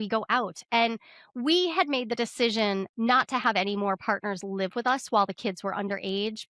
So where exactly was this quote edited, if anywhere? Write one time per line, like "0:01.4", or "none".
none